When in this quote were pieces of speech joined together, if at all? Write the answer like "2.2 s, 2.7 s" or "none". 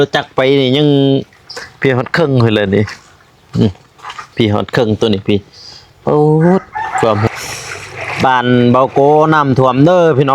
7.3 s